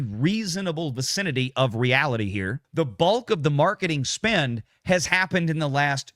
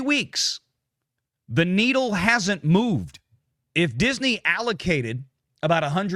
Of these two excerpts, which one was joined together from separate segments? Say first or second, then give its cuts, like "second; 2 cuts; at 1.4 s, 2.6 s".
first; 1 cut; at 2.6 s